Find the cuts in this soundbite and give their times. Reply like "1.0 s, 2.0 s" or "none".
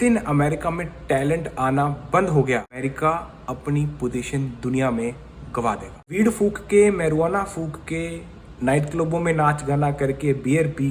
2.8 s, 6.1 s